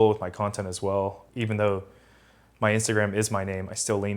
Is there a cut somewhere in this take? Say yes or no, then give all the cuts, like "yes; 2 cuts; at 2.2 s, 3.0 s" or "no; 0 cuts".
yes; 1 cut; at 1.2 s